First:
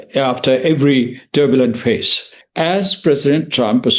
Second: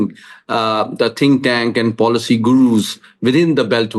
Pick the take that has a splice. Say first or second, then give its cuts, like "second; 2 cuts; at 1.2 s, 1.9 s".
first; 1 cut; at 2.4 s